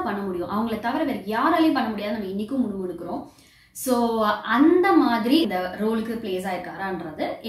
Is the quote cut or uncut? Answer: cut